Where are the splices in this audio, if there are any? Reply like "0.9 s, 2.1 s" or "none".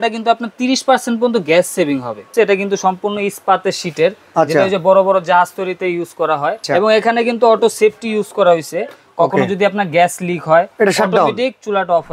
2.3 s, 6.6 s